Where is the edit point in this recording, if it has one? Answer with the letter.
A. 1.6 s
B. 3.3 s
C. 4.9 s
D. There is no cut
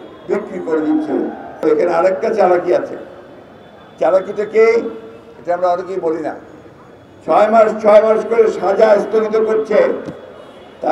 A